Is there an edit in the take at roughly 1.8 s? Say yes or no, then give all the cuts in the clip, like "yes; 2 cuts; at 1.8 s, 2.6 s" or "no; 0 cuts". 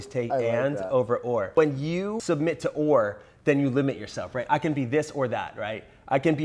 yes; 1 cut; at 1.8 s